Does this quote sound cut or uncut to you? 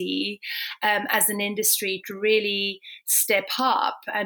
uncut